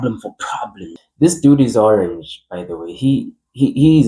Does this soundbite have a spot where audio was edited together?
yes; 1 cut; at 1.0 s

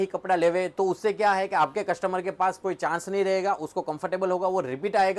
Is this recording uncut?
yes; 0 cuts

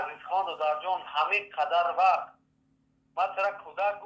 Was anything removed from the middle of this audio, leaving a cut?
no; 0 cuts

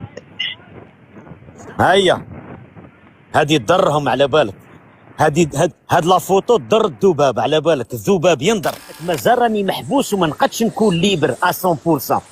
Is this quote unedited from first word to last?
no; 1 cut; at 9.1 s

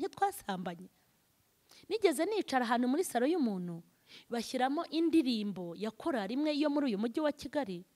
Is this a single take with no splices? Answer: yes; 0 cuts

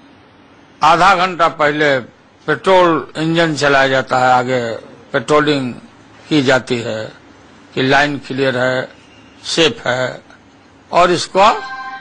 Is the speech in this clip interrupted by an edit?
no; 0 cuts

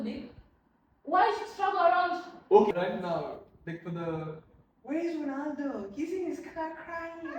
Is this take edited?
yes; 1 cut; at 2.7 s

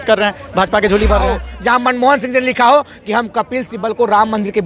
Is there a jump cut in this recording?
yes; 1 cut; at 1.5 s

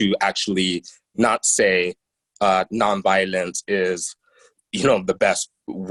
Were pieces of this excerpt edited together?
no; 0 cuts

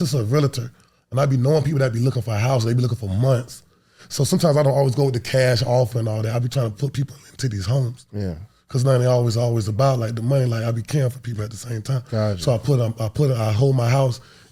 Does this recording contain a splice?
no; 0 cuts

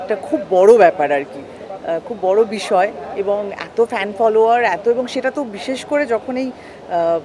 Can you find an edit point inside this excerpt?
no; 0 cuts

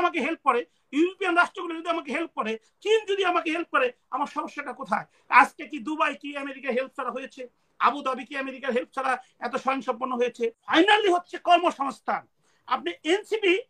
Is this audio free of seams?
no; 1 cut; at 10.7 s

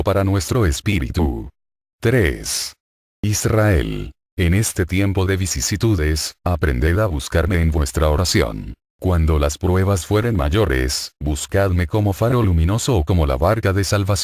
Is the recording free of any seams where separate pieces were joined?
no; 1 cut; at 5.9 s

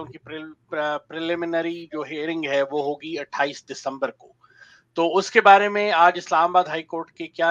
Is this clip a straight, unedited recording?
yes; 0 cuts

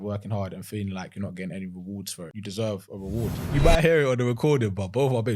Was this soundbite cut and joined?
yes; 2 cuts; at 2.3 s, 3.5 s

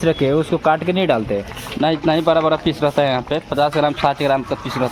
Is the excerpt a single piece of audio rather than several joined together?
yes; 0 cuts

